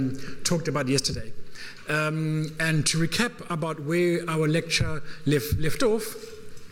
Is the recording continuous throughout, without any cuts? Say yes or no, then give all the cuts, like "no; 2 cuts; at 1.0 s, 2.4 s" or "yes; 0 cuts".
yes; 0 cuts